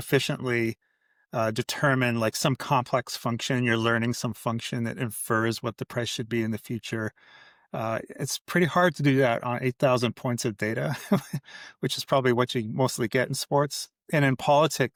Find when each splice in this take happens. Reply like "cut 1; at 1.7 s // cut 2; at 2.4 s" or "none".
none